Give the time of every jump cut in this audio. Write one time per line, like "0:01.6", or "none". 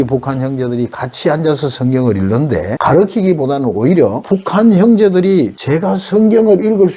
0:02.7
0:04.2
0:05.6